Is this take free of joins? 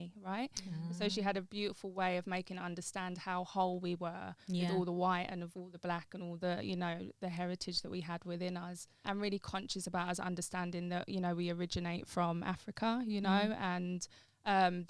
no; 1 cut; at 9.0 s

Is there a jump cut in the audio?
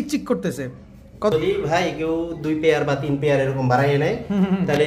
yes; 1 cut; at 1.3 s

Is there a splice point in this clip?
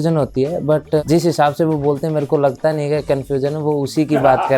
yes; 1 cut; at 1.0 s

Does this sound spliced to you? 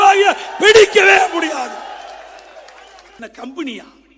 yes; 1 cut; at 3.2 s

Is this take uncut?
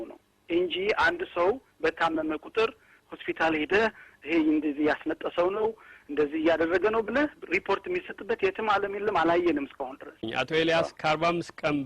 no; 1 cut; at 10.2 s

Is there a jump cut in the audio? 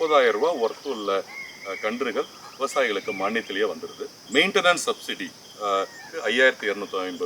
yes; 2 cuts; at 4.2 s, 6.0 s

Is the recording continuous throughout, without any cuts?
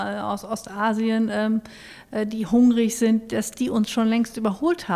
yes; 0 cuts

